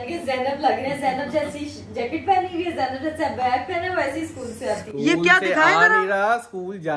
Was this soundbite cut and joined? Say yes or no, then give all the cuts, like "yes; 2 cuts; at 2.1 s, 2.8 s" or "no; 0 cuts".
no; 0 cuts